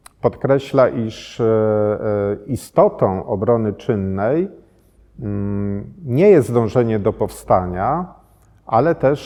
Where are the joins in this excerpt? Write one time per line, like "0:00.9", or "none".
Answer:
none